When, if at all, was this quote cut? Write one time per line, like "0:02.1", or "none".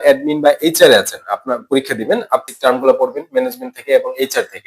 0:02.4

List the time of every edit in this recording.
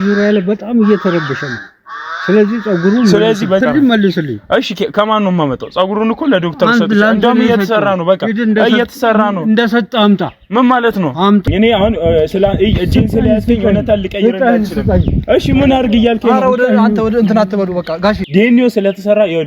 0:03.6
0:11.4
0:18.2

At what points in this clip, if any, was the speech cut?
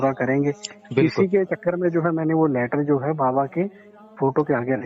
none

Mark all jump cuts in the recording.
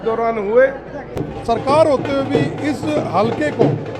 0:01.3

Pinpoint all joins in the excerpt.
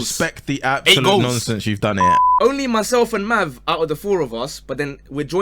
0:02.2

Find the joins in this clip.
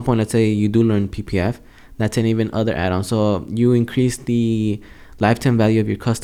none

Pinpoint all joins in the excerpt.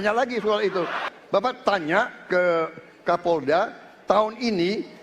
0:01.1

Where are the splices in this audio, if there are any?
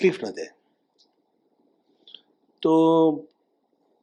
none

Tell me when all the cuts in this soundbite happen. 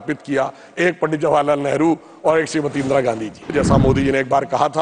0:03.5

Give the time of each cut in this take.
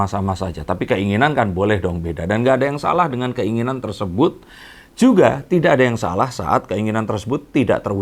none

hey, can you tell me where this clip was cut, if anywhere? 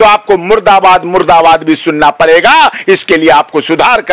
none

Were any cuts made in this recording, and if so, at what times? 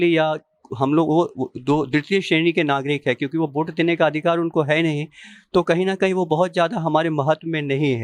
none

